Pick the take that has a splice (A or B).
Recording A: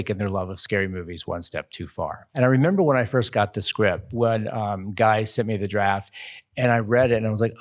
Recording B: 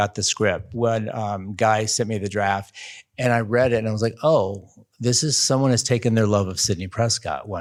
A